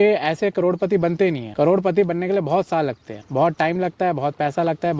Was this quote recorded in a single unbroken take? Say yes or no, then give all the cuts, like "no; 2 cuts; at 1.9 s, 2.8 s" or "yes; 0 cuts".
yes; 0 cuts